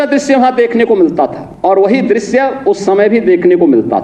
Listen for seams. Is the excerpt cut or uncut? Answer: cut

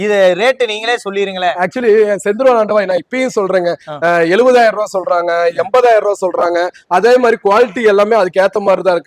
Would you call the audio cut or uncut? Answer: uncut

